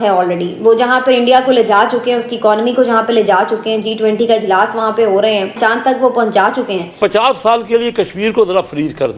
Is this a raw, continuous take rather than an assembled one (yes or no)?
no